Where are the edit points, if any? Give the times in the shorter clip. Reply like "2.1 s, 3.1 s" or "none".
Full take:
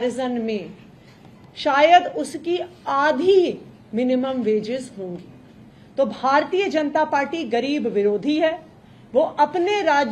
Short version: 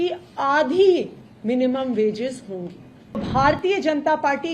3.2 s